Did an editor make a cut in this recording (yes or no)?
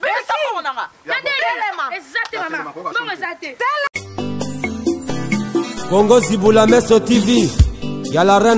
yes